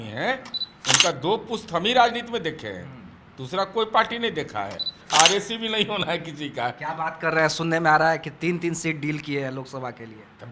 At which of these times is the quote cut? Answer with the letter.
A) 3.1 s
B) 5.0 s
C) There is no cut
B